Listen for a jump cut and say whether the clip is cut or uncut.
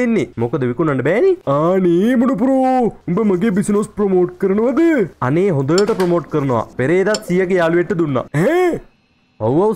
uncut